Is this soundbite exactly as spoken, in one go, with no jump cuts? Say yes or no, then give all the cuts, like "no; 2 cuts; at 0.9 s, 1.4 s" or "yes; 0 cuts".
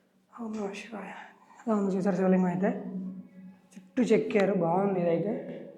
yes; 0 cuts